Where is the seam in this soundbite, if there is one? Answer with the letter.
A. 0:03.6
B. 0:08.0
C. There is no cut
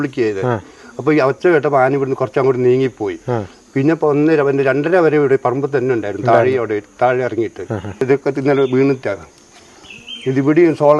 B